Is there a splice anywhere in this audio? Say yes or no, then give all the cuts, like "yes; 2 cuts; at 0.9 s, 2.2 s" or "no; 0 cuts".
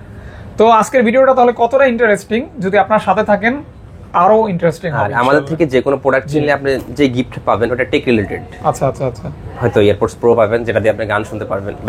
no; 0 cuts